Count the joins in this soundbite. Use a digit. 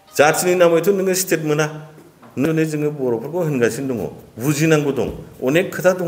1